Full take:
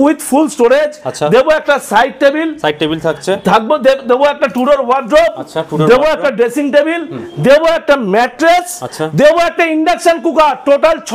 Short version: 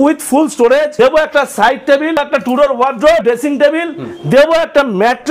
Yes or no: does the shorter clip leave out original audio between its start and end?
yes